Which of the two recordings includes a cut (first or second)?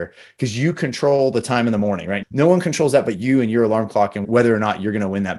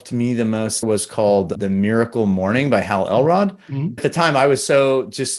second